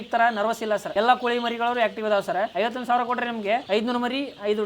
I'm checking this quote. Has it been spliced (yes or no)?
yes